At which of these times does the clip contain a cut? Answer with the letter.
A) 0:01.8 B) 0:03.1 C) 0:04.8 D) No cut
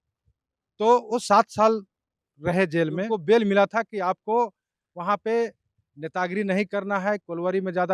B